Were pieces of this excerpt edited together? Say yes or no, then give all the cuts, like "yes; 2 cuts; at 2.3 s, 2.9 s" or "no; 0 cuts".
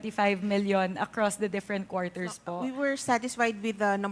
yes; 1 cut; at 2.5 s